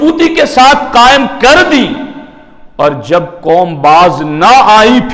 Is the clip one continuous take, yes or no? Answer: yes